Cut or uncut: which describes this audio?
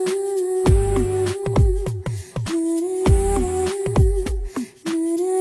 uncut